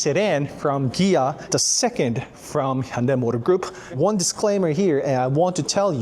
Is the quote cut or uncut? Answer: cut